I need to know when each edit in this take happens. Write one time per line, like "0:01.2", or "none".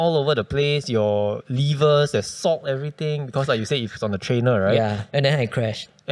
none